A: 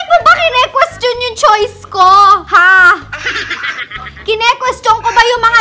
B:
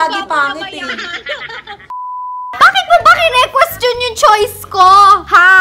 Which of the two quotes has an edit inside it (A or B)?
B